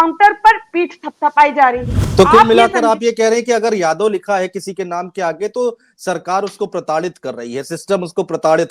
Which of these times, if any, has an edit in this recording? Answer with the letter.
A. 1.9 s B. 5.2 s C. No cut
A